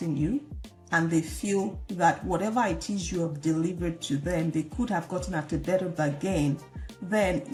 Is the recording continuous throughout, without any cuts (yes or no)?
yes